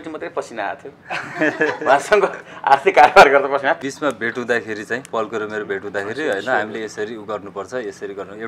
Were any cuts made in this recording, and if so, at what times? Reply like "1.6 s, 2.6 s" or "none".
3.7 s